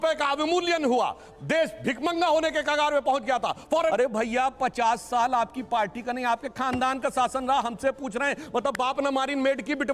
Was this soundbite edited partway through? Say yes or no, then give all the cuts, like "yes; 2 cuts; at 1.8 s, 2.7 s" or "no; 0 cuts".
yes; 1 cut; at 3.9 s